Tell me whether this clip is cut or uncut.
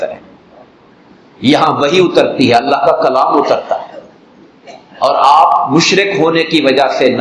uncut